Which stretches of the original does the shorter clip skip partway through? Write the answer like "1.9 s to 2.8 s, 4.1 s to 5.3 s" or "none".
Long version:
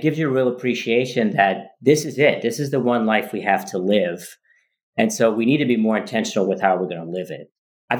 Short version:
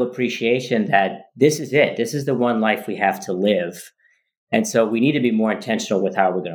none